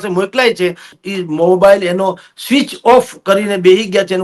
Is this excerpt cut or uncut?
cut